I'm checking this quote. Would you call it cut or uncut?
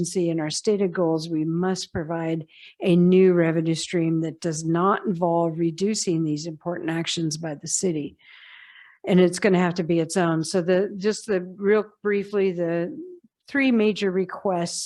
uncut